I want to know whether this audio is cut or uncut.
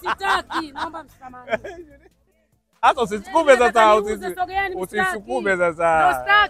uncut